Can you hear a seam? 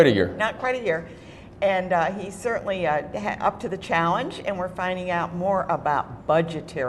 yes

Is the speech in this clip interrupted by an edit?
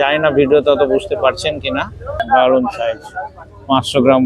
yes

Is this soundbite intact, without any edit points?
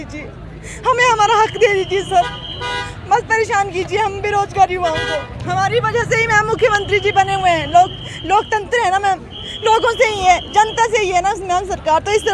yes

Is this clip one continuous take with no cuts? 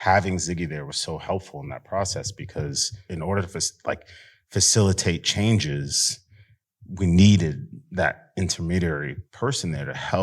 no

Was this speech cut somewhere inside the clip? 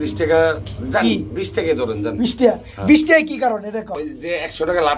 yes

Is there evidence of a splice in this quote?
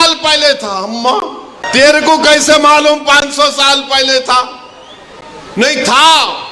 yes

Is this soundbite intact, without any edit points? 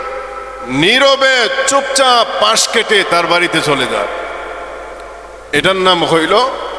yes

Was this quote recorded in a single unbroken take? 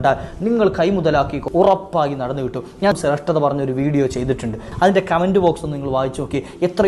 no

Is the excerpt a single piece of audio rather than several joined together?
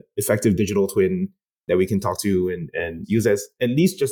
no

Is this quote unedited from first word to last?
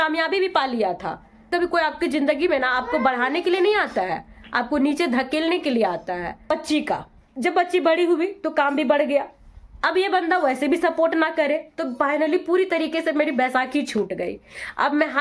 no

